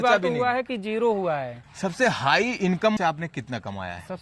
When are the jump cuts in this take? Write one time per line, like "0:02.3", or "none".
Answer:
0:01.6
0:03.0